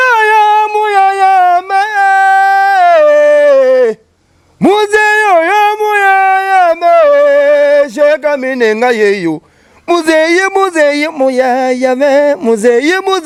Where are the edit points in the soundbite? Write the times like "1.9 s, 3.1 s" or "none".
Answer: none